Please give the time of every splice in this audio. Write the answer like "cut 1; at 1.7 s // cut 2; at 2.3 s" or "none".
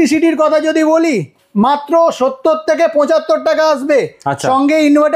none